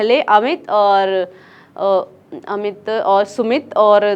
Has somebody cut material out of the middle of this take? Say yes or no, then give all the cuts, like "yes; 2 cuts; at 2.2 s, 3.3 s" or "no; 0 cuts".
no; 0 cuts